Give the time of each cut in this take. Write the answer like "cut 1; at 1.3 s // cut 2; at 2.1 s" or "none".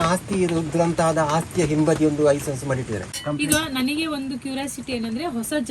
cut 1; at 3.1 s

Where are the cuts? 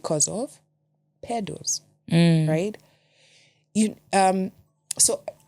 none

